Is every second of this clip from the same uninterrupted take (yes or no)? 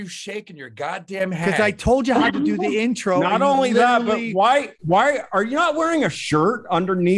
yes